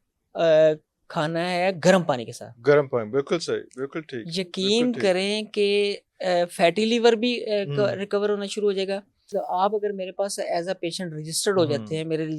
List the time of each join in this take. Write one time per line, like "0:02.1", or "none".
0:09.3